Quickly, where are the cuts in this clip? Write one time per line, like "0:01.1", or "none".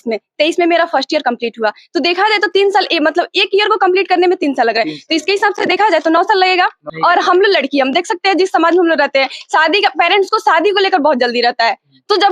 0:06.9